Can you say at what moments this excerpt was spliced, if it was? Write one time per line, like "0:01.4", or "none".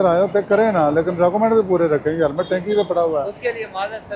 none